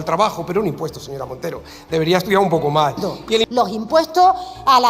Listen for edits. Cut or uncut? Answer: cut